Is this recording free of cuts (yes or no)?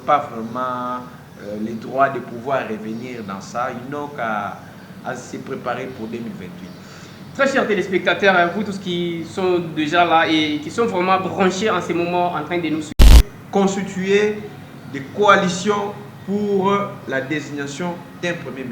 no